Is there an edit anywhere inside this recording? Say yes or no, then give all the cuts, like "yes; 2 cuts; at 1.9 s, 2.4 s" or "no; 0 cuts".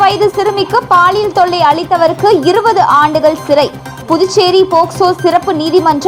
no; 0 cuts